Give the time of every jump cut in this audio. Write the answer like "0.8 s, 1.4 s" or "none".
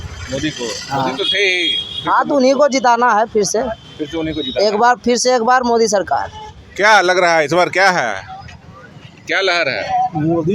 6.6 s